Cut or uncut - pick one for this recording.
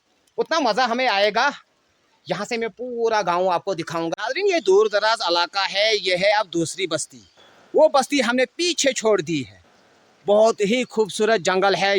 cut